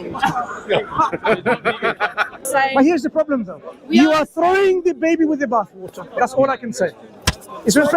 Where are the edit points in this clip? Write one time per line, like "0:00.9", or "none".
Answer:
0:02.4